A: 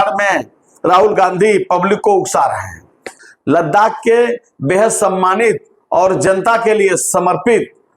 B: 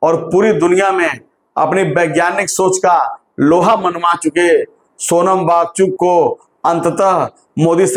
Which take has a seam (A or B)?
A